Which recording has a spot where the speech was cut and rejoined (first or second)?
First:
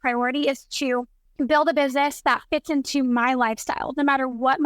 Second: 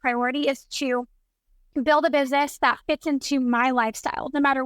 first